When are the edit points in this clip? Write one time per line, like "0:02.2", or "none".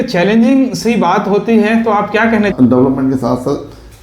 0:02.5